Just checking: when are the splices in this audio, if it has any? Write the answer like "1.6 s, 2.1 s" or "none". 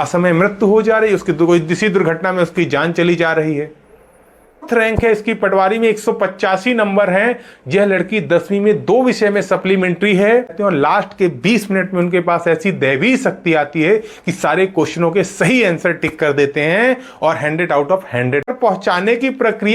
4.7 s, 10.6 s, 18.5 s